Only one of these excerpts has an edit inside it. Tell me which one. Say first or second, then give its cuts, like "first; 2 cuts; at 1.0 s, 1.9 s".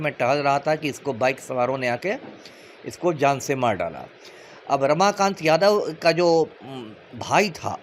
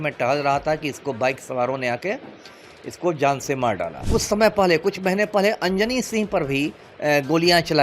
second; 1 cut; at 4.0 s